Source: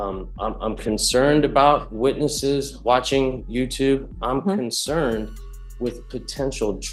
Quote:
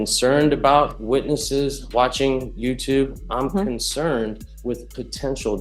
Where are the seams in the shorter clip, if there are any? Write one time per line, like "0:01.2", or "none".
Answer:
0:04.5